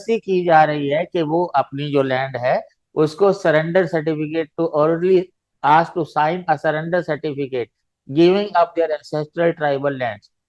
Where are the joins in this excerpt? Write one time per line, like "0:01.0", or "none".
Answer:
none

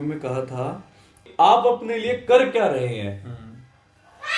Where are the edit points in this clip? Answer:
0:01.2

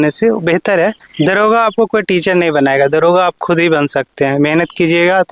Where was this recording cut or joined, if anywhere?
0:01.0

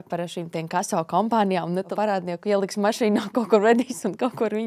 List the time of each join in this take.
0:01.9

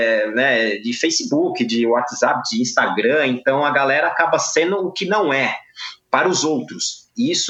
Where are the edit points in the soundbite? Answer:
none

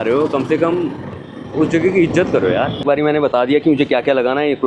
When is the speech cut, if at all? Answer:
0:02.8

